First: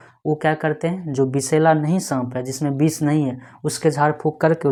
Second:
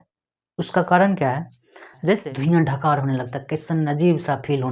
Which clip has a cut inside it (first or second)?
second